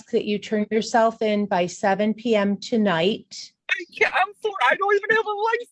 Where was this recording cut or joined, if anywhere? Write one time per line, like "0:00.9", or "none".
none